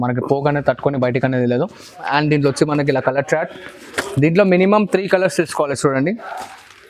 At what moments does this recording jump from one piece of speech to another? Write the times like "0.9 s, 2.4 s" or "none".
2.0 s